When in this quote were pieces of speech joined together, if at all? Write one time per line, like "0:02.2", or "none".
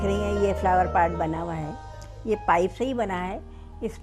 none